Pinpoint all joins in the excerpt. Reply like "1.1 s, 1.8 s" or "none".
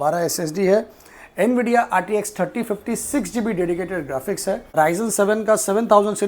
4.7 s

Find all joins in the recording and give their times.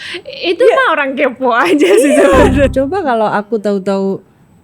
2.7 s

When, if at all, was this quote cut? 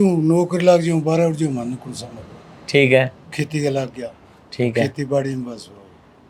none

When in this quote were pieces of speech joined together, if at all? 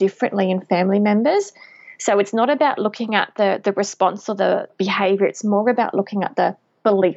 4.7 s

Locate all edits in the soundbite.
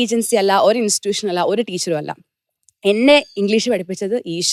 none

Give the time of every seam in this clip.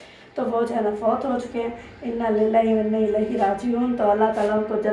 none

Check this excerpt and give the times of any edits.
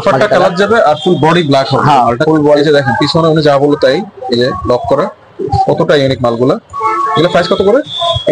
none

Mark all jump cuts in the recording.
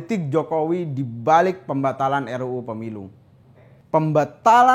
3.8 s

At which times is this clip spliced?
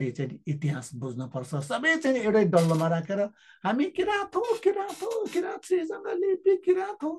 none

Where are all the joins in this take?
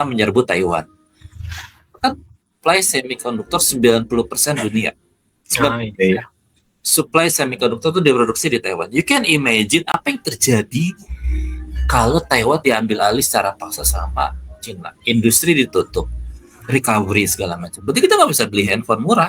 none

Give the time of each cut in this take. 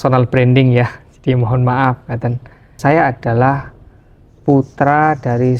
2.7 s

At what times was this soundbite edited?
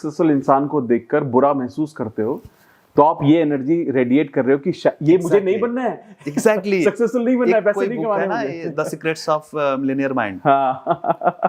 none

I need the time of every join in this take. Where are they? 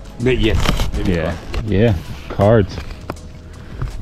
1.5 s

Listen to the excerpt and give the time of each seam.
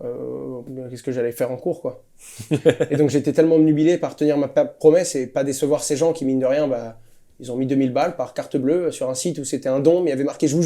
none

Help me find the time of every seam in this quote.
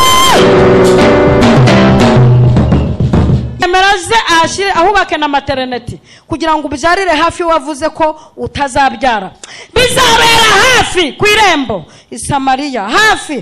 3.6 s

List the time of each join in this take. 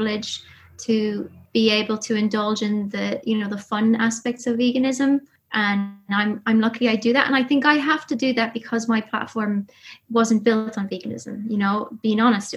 1.4 s, 5.4 s

